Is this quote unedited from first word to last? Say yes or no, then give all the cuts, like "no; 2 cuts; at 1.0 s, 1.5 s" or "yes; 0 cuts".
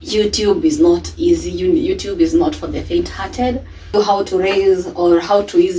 no; 1 cut; at 3.9 s